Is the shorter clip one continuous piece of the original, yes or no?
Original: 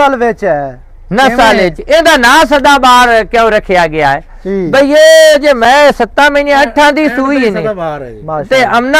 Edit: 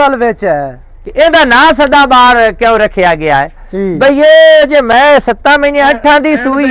no